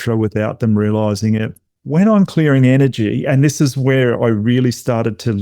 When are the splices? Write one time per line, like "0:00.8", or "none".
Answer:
0:01.6